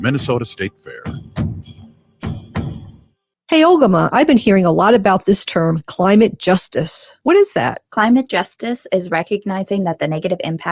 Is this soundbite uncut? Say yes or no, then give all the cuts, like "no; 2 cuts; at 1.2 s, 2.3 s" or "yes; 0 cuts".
no; 1 cut; at 3.3 s